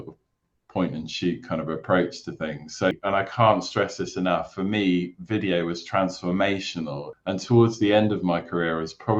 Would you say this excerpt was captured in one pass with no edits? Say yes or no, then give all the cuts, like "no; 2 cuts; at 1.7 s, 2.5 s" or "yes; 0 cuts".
no; 2 cuts; at 2.9 s, 7.1 s